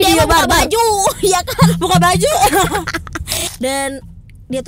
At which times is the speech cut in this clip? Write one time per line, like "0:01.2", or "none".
0:03.4